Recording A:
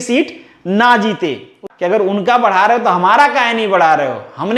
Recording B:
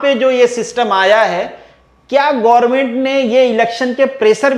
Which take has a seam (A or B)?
A